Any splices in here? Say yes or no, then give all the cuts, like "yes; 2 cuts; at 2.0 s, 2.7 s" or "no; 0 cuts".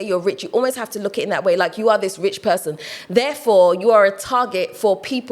no; 0 cuts